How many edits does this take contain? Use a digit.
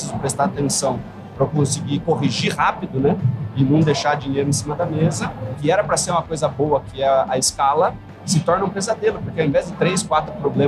1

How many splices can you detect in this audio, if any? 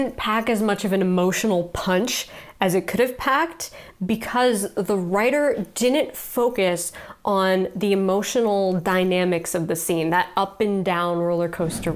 0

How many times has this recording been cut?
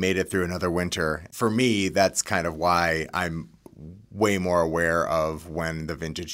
1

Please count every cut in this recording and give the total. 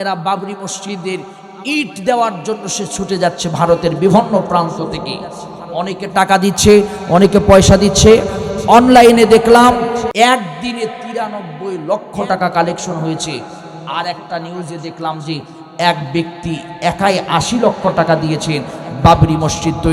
1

